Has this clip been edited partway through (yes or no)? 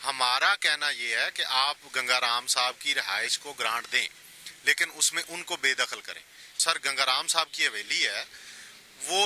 yes